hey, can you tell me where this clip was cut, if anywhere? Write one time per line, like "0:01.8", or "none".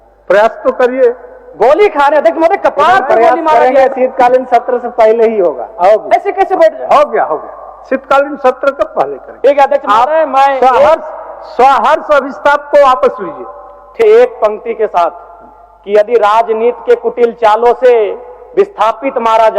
0:14.0